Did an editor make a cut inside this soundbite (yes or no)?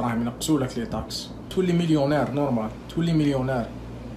yes